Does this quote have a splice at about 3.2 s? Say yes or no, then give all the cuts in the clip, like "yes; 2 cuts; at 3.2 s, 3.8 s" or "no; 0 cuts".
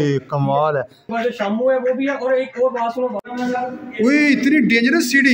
yes; 2 cuts; at 1.1 s, 3.2 s